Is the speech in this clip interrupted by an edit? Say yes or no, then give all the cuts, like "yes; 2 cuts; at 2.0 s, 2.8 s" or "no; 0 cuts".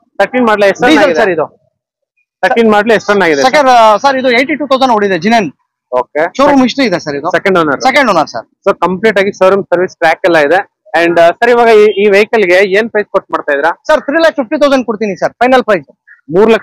no; 0 cuts